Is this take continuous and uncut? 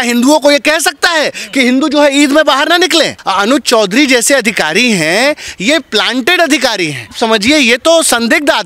no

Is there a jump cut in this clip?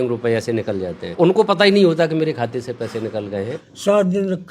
yes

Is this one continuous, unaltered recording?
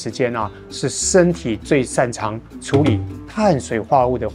yes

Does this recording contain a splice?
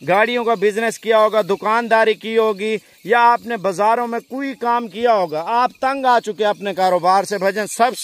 no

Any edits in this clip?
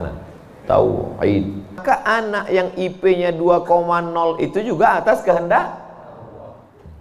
yes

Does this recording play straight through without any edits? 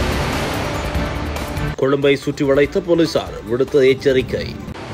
no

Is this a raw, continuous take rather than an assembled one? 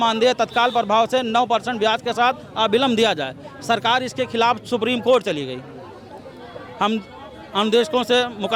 yes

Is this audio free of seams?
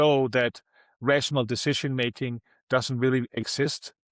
yes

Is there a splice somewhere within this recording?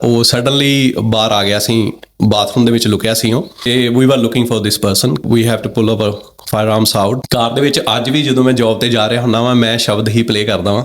yes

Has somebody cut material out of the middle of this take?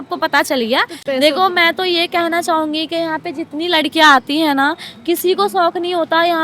yes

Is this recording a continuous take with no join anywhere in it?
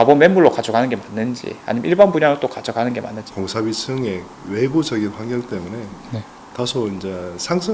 no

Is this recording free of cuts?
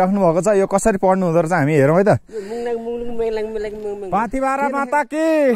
no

